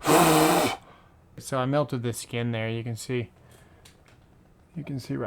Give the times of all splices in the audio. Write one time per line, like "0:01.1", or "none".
0:01.4